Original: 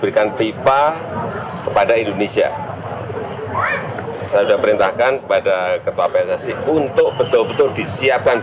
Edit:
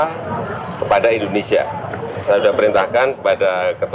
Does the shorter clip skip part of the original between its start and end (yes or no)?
yes